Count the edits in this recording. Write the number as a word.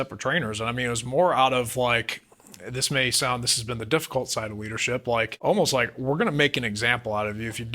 one